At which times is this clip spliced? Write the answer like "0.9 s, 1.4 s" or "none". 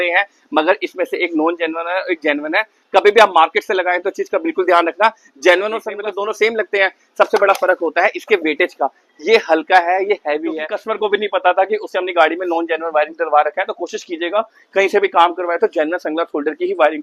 5.9 s, 10.7 s